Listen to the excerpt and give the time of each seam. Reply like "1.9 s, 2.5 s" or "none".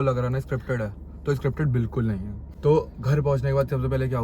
2.5 s